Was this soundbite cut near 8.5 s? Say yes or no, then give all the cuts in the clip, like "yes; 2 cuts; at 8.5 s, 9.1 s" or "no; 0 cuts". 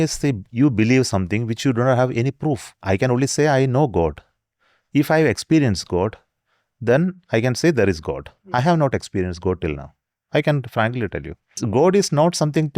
no; 2 cuts; at 2.7 s, 11.6 s